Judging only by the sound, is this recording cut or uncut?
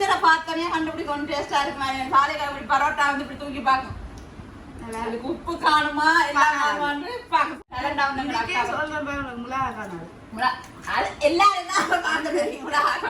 cut